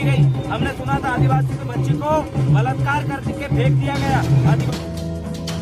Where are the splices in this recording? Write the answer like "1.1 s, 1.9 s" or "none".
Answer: 4.6 s